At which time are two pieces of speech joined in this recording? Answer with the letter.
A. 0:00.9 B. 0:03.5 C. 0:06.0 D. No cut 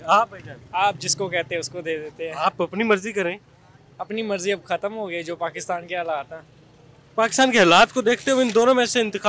D